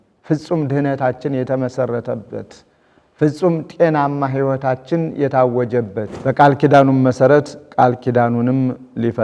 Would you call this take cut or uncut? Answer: cut